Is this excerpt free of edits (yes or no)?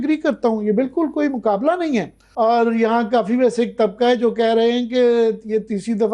no